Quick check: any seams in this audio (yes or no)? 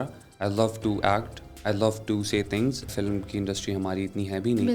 yes